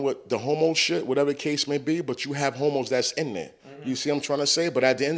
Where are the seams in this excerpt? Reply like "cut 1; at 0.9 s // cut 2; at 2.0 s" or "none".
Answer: none